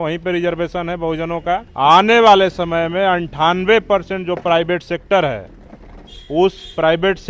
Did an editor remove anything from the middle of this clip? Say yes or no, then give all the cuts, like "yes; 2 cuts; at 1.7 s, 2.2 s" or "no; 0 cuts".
yes; 1 cut; at 1.7 s